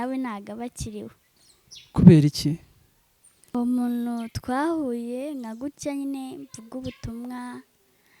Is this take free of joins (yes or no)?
no